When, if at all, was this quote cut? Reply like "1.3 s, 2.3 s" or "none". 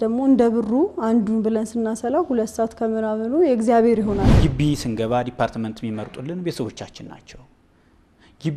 4.3 s